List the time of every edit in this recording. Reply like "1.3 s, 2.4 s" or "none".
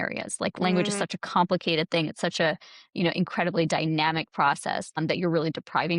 5.0 s